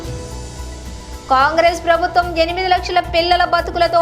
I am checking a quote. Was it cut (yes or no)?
no